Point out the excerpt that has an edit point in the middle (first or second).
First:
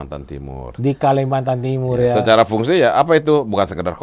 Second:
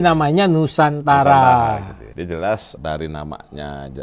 second